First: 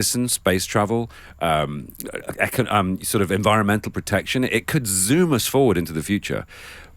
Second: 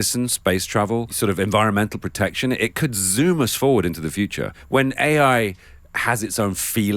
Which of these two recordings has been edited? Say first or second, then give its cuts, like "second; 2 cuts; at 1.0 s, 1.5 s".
second; 2 cuts; at 1.1 s, 4.5 s